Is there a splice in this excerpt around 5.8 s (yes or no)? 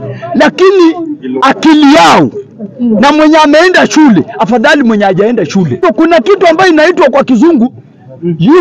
yes